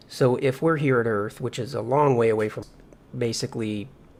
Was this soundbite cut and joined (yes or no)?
no